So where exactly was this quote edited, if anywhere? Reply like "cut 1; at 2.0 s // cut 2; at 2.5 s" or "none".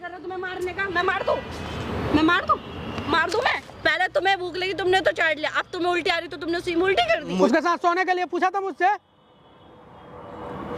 cut 1; at 3.7 s // cut 2; at 7.4 s